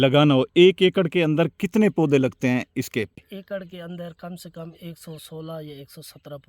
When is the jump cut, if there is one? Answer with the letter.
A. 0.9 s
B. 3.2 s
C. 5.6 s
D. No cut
B